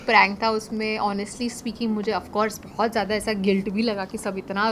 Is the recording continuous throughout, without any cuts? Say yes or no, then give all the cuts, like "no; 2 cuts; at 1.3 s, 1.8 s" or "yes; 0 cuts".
yes; 0 cuts